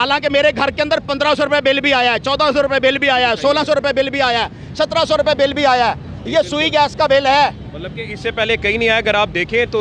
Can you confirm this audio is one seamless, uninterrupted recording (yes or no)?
yes